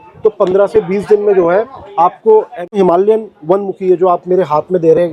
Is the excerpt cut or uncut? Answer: cut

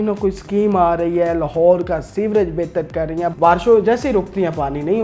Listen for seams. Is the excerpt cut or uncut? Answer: cut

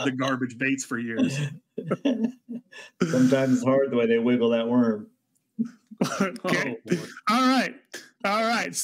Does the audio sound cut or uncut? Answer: uncut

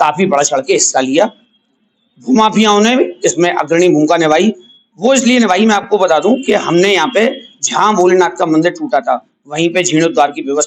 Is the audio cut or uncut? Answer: uncut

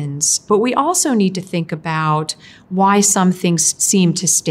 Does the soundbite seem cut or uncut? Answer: uncut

